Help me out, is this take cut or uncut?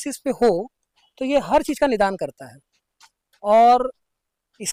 uncut